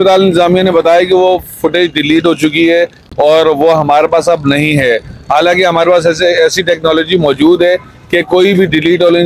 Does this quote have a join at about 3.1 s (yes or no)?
no